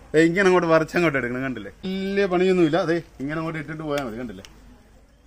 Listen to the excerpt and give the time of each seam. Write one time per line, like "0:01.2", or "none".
0:01.9